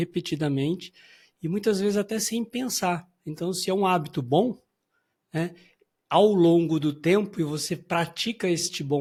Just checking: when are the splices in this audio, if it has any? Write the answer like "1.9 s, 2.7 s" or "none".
none